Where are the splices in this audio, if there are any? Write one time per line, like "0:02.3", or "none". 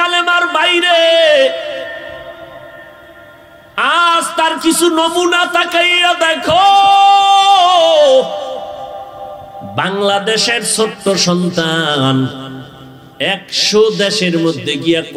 none